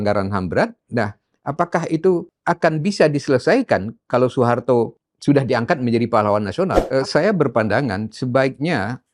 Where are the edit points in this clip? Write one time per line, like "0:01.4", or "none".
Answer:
0:02.3
0:05.1
0:06.8